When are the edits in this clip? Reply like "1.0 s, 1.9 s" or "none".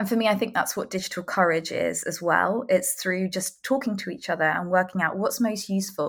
none